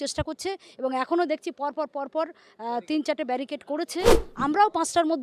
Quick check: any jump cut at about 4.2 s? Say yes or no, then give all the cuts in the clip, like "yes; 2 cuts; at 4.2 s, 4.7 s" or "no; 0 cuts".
yes; 1 cut; at 4.2 s